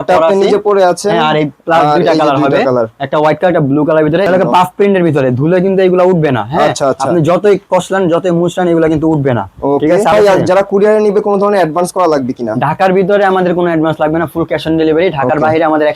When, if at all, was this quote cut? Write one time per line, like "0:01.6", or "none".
0:04.3
0:10.1

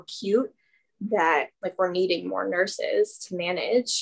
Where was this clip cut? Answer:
0:01.5

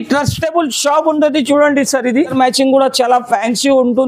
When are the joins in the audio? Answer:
0:02.3

